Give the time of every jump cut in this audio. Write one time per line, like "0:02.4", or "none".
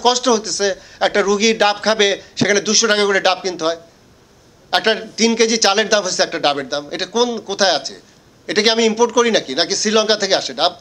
none